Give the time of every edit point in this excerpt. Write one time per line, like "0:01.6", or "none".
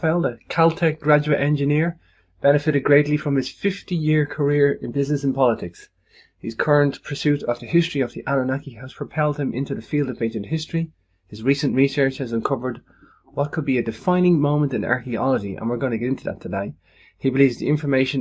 none

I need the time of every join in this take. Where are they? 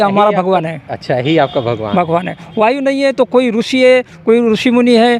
none

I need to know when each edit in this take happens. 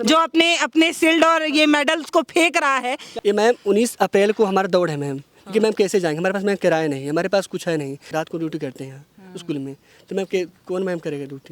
0:03.1
0:08.1

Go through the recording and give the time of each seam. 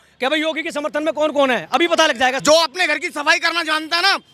0:02.4

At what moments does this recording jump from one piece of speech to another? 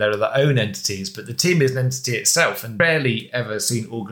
0:02.7

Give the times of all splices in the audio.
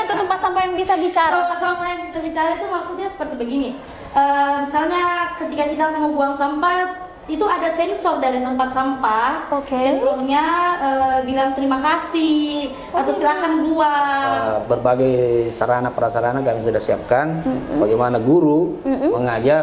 0:14.3

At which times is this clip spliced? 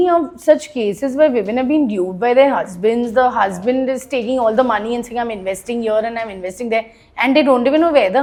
none

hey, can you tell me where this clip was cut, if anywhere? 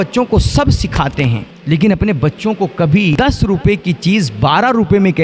0:01.5
0:03.1

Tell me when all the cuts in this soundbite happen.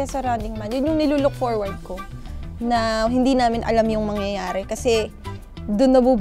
none

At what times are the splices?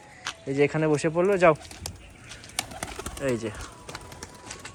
none

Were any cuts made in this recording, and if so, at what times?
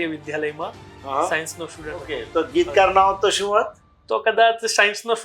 0:02.2

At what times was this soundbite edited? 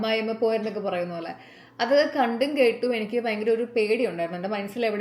none

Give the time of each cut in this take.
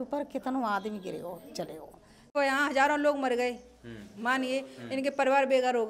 0:02.3

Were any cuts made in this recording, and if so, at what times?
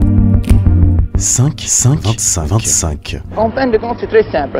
0:00.9

